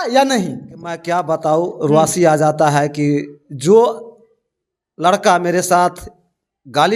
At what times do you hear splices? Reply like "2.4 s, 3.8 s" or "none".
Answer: 1.0 s